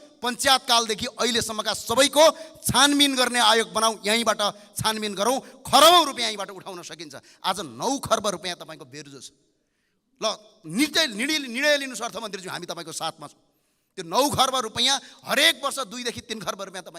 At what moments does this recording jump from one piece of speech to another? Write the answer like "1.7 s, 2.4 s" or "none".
none